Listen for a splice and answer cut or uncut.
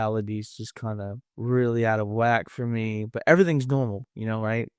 cut